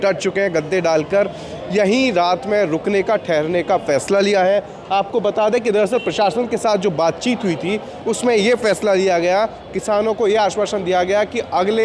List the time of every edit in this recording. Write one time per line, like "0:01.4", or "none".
none